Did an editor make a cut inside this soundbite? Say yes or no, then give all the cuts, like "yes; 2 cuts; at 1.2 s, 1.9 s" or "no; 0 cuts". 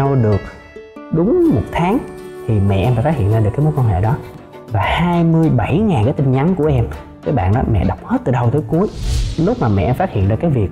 yes; 2 cuts; at 4.3 s, 9.2 s